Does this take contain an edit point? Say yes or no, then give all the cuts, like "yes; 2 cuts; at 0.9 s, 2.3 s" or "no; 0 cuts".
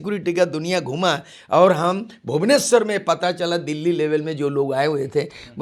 no; 0 cuts